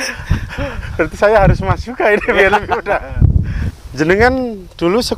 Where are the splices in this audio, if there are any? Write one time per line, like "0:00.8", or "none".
0:03.7